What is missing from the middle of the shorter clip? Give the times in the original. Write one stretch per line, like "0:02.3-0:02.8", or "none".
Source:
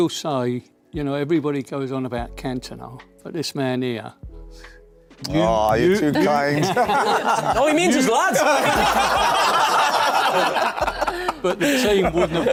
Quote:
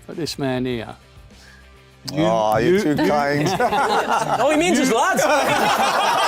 none